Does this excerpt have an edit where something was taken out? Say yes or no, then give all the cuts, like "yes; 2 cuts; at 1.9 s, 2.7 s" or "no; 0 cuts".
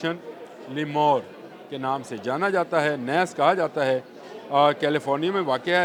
no; 0 cuts